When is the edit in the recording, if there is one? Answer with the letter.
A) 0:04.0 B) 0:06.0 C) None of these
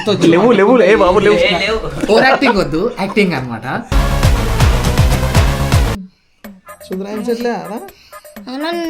B